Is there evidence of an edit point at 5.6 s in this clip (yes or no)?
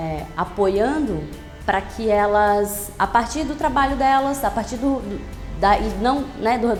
no